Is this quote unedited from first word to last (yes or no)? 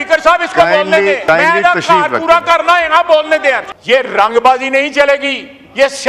no